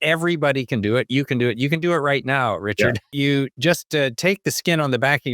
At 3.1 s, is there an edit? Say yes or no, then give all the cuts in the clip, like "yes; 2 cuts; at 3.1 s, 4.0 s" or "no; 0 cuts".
yes; 1 cut; at 3.1 s